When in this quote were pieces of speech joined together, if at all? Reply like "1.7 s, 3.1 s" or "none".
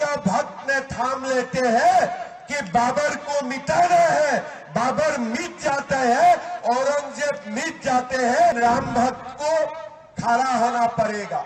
8.6 s